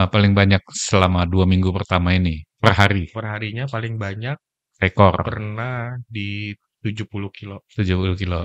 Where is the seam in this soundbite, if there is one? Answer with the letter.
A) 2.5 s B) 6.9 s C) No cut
A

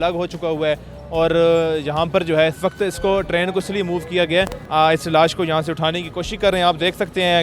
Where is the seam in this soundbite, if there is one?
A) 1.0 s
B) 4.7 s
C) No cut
B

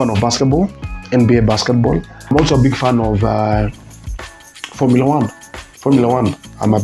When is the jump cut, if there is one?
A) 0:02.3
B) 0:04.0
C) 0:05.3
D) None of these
A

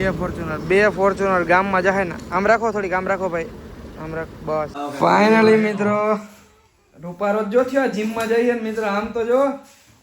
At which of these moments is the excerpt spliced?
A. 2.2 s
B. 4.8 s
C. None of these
B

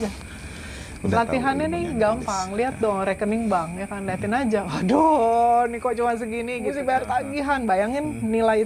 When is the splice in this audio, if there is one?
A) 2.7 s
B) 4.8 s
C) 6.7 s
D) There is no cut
C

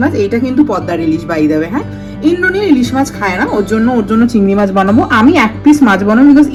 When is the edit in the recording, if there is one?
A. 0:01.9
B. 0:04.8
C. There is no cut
C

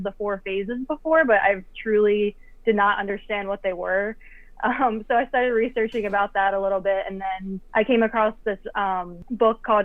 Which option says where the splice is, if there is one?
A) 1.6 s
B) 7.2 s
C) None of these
C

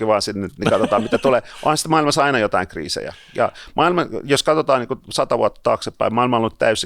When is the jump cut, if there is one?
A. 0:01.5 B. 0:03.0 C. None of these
C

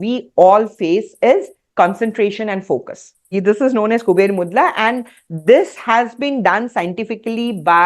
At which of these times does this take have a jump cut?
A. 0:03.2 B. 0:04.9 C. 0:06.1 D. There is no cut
A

